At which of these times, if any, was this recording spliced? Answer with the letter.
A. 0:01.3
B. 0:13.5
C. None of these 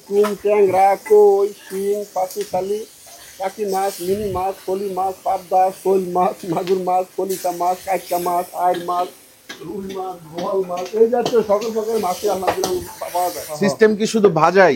B